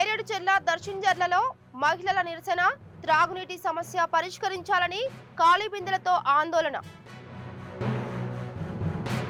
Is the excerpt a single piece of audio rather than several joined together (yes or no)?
yes